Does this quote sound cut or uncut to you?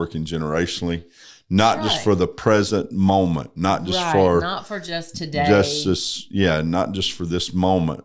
uncut